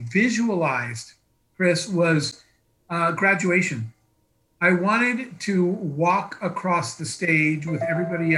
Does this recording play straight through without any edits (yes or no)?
yes